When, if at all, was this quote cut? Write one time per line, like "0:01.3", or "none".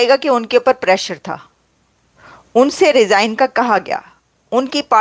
none